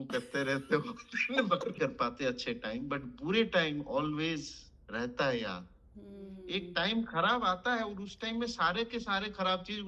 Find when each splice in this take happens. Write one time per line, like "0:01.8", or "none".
0:01.8
0:06.4